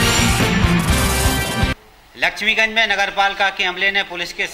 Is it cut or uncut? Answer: cut